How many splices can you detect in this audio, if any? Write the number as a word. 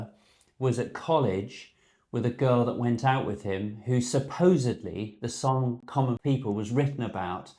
one